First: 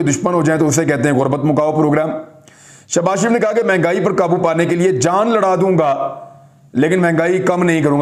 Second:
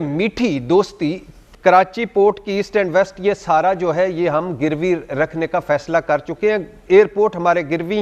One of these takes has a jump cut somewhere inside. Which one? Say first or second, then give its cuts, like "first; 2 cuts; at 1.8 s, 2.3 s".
second; 1 cut; at 1.4 s